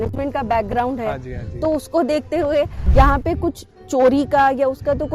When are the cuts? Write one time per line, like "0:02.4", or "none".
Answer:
0:02.8